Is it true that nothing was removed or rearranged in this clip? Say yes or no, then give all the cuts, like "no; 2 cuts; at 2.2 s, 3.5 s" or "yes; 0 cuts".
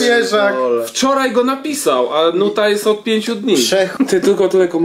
no; 1 cut; at 3.9 s